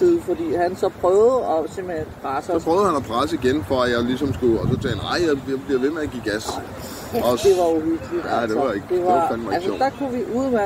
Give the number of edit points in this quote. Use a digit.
0